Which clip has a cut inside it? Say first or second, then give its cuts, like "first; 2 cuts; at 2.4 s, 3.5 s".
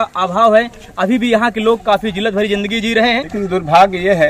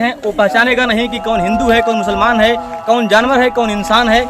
first; 1 cut; at 3.3 s